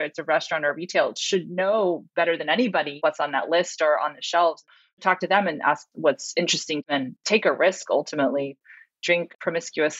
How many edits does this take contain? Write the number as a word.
three